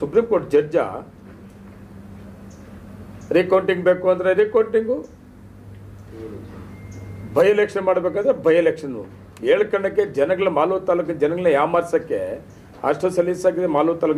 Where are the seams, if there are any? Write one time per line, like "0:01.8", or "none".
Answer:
none